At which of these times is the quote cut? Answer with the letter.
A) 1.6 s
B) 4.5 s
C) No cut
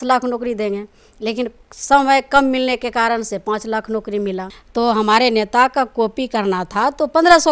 B